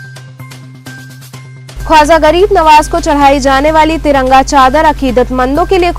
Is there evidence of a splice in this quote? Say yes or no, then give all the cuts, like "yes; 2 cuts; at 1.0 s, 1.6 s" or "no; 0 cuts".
yes; 1 cut; at 1.6 s